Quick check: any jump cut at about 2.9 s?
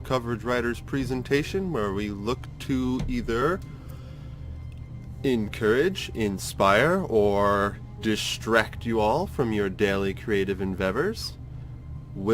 no; 1 cut; at 8.3 s

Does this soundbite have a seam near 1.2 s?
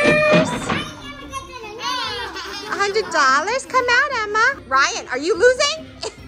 no; 1 cut; at 4.6 s

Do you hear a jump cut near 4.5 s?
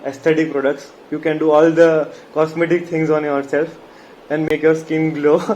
yes; 1 cut; at 4.5 s

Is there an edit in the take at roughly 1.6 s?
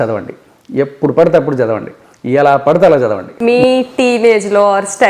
no; 1 cut; at 3.3 s

